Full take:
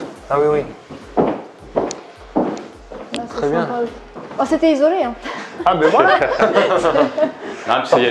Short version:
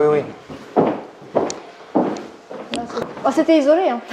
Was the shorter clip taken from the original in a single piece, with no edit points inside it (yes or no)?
no